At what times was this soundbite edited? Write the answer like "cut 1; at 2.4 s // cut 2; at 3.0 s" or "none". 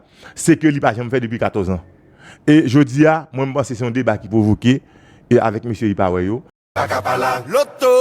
cut 1; at 6.6 s